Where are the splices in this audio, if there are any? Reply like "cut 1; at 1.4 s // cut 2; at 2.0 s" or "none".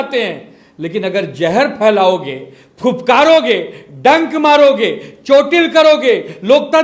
none